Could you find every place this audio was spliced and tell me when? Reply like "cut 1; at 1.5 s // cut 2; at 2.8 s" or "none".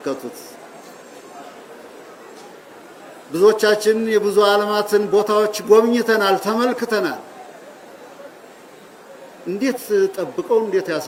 none